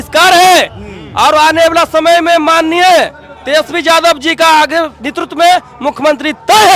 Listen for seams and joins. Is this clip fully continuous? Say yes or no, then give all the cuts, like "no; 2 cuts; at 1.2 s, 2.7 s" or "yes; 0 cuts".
yes; 0 cuts